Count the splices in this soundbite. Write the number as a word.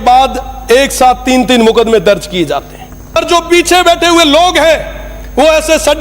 one